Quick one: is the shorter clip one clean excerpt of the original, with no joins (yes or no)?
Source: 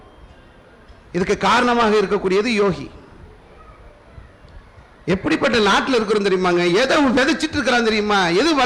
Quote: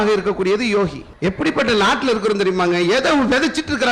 no